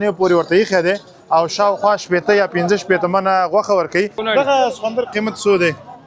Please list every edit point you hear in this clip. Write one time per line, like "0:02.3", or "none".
0:04.2